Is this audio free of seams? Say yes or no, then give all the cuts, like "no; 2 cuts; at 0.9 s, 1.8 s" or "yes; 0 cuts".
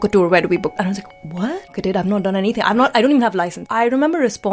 no; 3 cuts; at 0.8 s, 1.8 s, 3.6 s